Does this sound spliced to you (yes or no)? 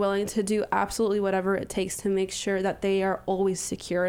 no